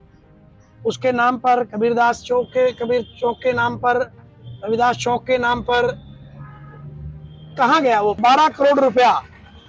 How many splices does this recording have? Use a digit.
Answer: 1